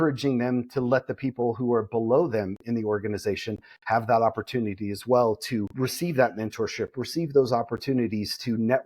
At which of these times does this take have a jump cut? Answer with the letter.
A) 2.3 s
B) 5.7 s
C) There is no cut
B